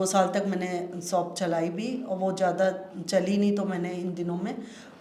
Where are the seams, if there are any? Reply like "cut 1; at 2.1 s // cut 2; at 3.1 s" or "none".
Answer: none